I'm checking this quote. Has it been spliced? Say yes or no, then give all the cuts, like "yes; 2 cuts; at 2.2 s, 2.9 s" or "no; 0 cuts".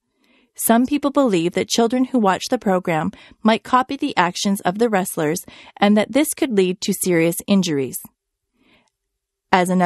no; 0 cuts